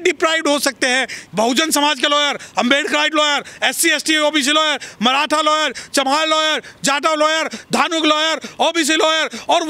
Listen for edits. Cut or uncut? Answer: cut